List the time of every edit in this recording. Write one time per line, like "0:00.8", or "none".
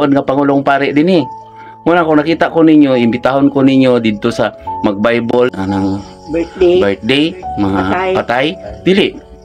0:06.0